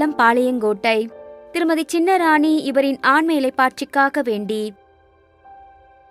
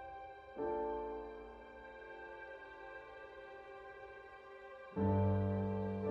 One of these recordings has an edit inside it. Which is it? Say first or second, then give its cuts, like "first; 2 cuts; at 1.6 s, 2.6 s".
first; 1 cut; at 4.8 s